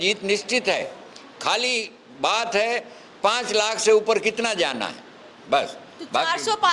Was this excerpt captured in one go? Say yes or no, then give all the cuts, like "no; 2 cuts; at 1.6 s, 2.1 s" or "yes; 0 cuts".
yes; 0 cuts